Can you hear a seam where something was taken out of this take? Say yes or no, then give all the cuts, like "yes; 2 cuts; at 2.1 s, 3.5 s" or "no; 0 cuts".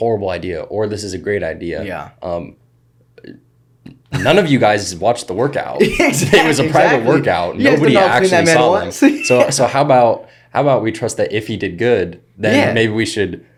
no; 0 cuts